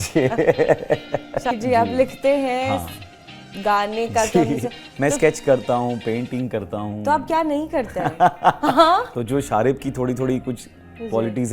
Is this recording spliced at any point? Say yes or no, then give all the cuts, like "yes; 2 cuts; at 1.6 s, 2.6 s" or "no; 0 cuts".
yes; 2 cuts; at 1.5 s, 9.1 s